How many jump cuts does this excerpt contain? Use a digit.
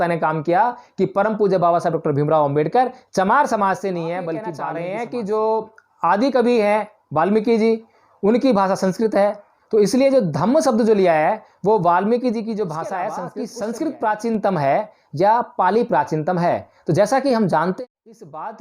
3